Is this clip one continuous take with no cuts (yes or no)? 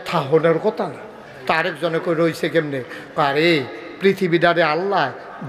yes